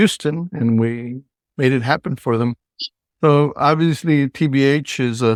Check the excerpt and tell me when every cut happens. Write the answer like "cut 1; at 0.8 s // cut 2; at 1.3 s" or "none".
none